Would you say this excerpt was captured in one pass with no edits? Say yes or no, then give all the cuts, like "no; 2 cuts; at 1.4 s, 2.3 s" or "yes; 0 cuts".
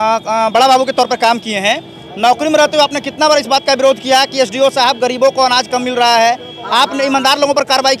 yes; 0 cuts